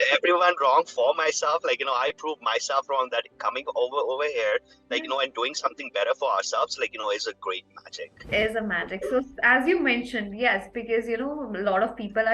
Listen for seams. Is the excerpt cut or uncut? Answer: cut